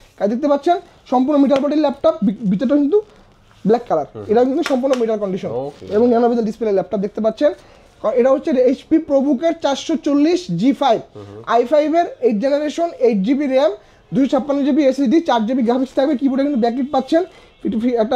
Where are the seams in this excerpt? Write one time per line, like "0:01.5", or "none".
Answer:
none

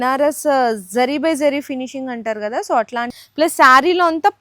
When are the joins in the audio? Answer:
0:03.2

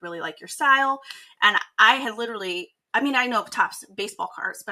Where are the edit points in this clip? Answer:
none

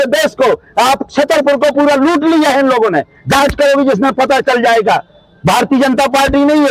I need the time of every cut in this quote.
none

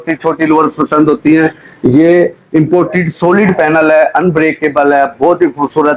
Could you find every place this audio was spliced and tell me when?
none

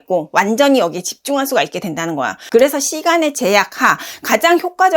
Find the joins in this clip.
0:02.4

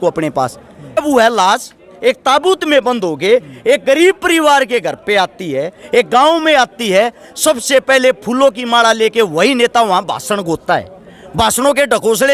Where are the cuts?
0:01.0

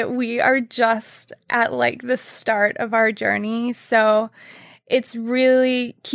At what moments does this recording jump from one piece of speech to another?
none

